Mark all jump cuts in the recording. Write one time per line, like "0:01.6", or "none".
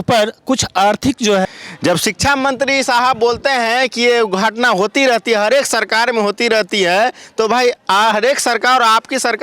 0:01.4